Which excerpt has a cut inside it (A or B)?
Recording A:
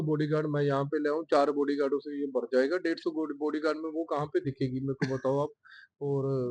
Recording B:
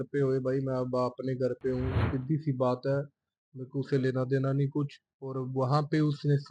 B